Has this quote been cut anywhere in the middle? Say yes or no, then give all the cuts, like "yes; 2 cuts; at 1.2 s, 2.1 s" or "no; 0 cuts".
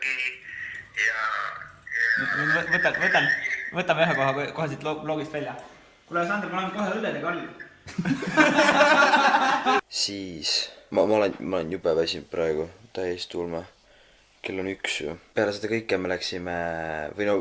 no; 0 cuts